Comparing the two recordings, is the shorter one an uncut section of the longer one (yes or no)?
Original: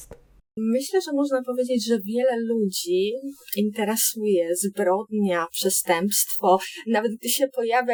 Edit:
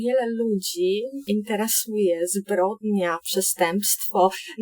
no